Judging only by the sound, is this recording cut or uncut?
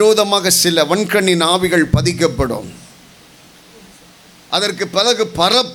uncut